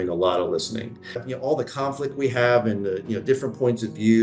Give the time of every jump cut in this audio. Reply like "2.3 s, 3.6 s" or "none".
1.2 s